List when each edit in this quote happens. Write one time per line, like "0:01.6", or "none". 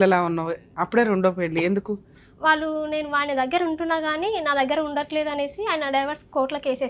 0:02.1